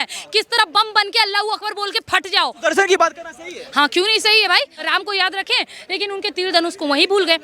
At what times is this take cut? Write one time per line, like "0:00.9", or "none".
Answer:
0:02.6
0:04.9